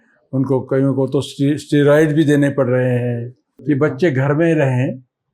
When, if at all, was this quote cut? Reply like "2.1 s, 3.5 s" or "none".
3.5 s